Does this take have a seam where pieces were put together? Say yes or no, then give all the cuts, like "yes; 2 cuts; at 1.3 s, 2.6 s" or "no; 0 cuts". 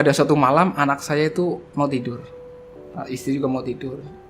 yes; 1 cut; at 1.7 s